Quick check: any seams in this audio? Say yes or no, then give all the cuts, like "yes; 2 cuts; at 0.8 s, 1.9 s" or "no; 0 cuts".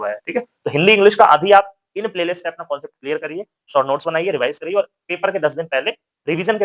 no; 0 cuts